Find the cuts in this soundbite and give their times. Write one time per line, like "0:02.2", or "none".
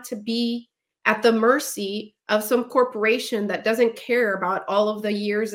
none